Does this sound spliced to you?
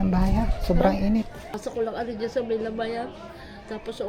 yes; 1 cut; at 1.6 s

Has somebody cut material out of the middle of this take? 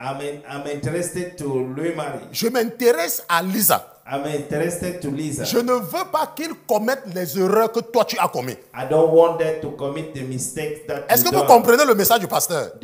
no; 0 cuts

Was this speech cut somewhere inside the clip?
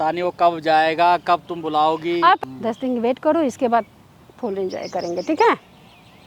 yes; 1 cut; at 2.4 s

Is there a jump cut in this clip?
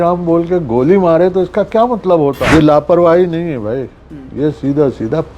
yes; 1 cut; at 2.4 s

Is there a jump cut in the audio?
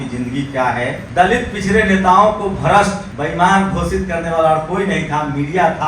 yes; 2 cuts; at 1.0 s, 3.1 s

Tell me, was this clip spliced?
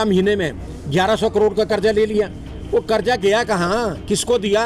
no; 0 cuts

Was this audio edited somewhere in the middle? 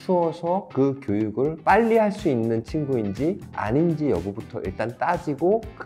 no; 0 cuts

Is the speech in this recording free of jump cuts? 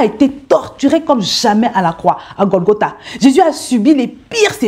yes; 0 cuts

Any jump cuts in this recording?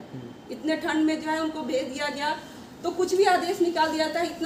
no; 0 cuts

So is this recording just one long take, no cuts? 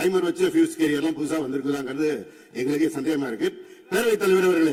yes; 0 cuts

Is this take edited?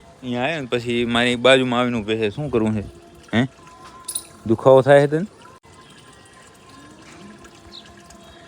yes; 1 cut; at 5.6 s

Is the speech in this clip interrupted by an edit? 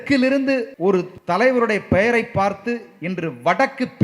yes; 1 cut; at 1.0 s

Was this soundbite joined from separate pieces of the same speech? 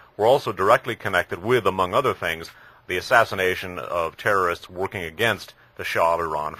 no; 0 cuts

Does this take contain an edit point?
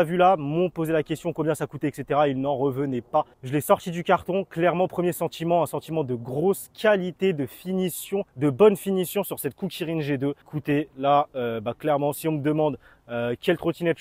no; 0 cuts

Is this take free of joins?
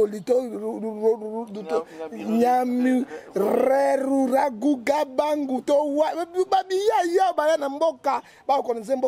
yes; 0 cuts

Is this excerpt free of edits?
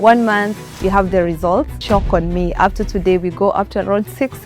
no; 1 cut; at 1.8 s

